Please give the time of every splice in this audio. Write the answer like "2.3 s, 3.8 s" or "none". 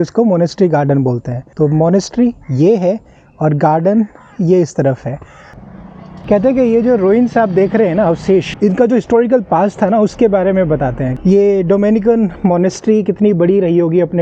none